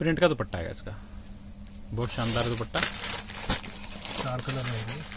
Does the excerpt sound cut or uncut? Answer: uncut